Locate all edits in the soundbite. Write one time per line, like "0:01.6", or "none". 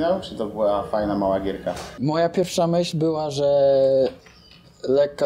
0:01.9

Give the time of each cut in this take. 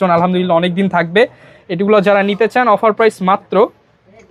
none

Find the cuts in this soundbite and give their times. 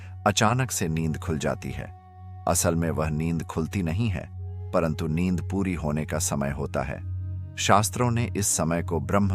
none

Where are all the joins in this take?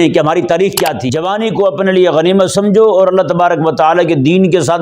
0:01.0

